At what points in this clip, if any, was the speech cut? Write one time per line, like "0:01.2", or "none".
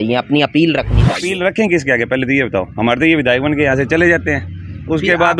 0:01.0